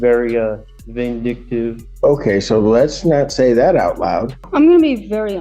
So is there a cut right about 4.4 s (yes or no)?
yes